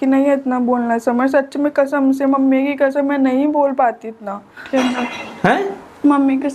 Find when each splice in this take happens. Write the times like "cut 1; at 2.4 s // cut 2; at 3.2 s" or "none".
cut 1; at 4.6 s